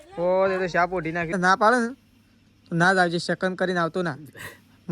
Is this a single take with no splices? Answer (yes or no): no